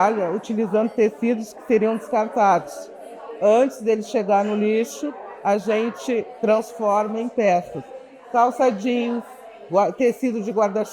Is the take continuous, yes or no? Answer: yes